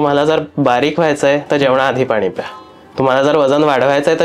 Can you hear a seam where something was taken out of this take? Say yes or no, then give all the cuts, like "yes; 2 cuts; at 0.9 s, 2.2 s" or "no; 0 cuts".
no; 0 cuts